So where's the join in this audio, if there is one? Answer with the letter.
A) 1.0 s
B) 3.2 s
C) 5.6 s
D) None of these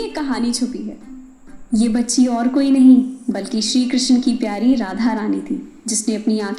A